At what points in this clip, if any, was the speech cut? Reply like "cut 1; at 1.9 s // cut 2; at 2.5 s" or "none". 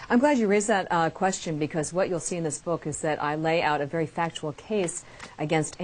cut 1; at 1.4 s